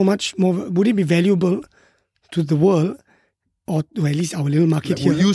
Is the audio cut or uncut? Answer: uncut